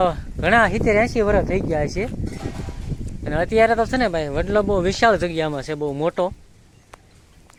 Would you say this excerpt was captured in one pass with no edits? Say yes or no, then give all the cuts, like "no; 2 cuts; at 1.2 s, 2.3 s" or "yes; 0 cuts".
yes; 0 cuts